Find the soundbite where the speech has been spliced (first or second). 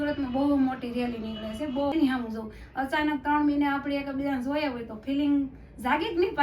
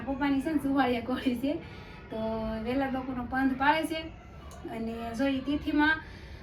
first